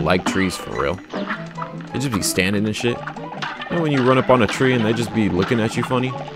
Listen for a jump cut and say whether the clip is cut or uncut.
uncut